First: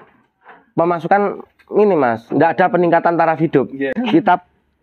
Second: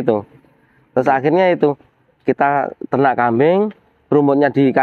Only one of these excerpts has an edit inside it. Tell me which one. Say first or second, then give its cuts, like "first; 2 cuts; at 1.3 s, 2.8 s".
first; 1 cut; at 3.9 s